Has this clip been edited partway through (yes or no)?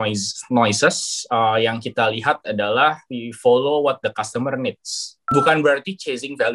yes